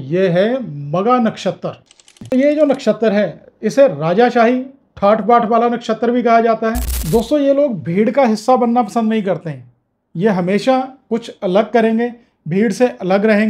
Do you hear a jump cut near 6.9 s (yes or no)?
yes